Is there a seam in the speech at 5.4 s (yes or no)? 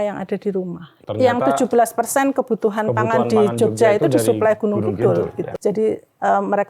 yes